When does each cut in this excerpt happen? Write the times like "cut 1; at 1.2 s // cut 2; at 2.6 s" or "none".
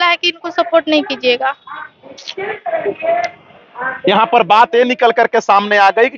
none